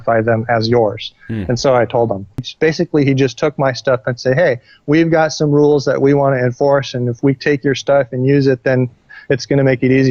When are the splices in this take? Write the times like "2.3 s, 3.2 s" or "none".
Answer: 2.5 s